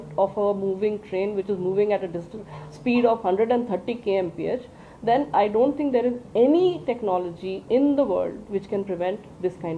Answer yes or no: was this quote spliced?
no